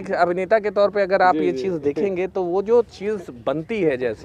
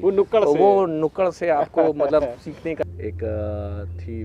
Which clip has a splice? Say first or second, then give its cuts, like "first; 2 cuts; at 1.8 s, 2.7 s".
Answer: second; 1 cut; at 2.8 s